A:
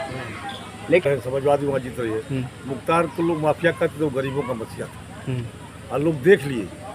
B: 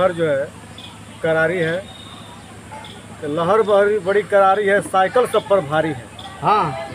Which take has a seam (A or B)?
A